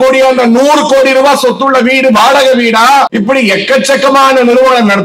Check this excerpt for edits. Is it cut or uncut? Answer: cut